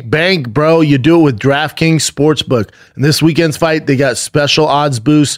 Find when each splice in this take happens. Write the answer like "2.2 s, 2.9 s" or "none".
2.9 s